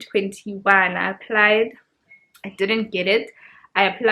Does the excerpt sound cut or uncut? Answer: uncut